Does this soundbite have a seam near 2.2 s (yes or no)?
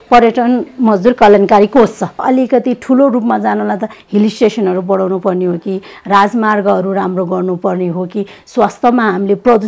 yes